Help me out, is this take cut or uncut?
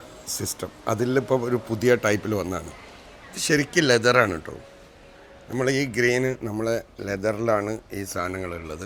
uncut